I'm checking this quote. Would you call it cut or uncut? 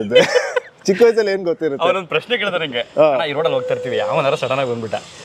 uncut